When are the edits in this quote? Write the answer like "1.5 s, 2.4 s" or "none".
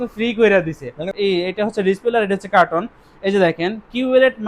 1.0 s